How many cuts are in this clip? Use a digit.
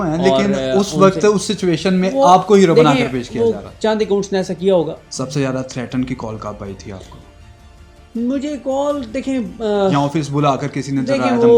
1